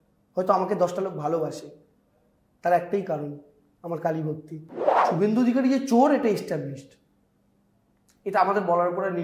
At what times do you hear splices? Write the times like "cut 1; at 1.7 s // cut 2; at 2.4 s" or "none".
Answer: cut 1; at 5.1 s